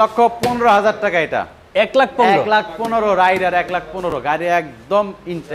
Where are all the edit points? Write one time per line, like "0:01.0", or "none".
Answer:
none